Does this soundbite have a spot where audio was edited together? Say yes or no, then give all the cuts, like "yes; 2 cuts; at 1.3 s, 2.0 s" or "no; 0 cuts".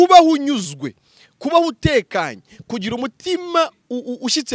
no; 0 cuts